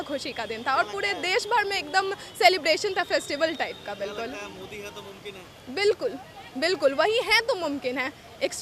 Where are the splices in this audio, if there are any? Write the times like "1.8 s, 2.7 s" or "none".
none